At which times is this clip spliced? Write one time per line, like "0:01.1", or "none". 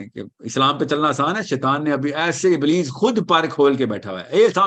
none